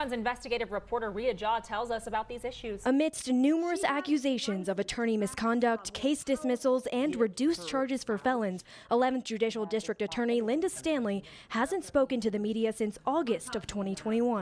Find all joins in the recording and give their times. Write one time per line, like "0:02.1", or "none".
0:02.8